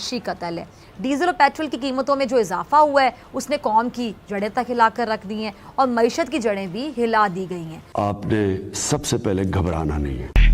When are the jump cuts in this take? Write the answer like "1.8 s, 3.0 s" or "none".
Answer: 7.8 s